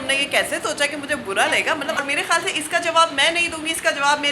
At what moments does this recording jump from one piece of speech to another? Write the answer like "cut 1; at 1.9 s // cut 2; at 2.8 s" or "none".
cut 1; at 2.0 s

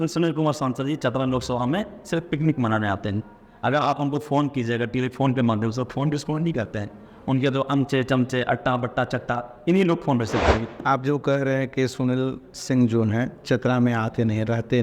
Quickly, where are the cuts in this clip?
cut 1; at 10.8 s

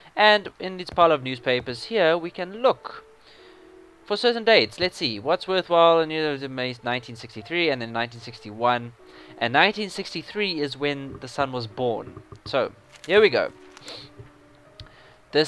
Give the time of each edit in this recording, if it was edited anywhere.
cut 1; at 9.9 s

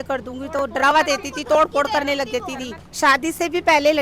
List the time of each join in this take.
cut 1; at 2.8 s

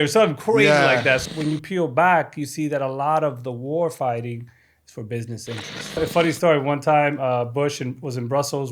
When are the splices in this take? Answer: cut 1; at 1.2 s // cut 2; at 6.0 s

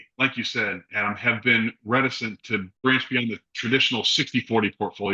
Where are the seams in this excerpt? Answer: cut 1; at 2.8 s

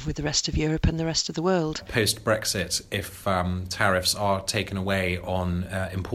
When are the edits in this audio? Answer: cut 1; at 1.8 s

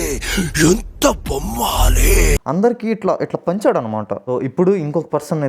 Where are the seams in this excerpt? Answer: cut 1; at 2.4 s // cut 2; at 4.2 s

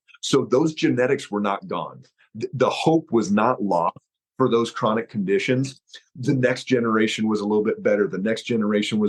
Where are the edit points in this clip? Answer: none

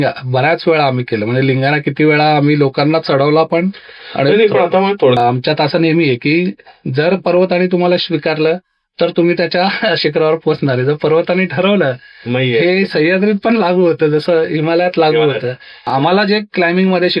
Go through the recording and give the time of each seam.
cut 1; at 5.2 s // cut 2; at 15.9 s

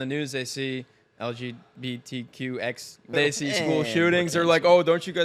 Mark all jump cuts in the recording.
cut 1; at 3.1 s

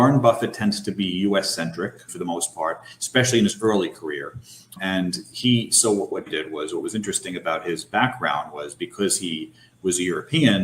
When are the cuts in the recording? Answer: cut 1; at 2.1 s // cut 2; at 4.8 s // cut 3; at 6.2 s

